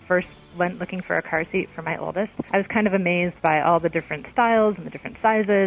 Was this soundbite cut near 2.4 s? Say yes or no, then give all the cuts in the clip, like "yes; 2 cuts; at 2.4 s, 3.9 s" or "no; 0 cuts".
yes; 1 cut; at 2.4 s